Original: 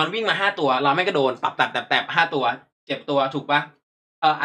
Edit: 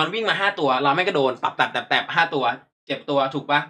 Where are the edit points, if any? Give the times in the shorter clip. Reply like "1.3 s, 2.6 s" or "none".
none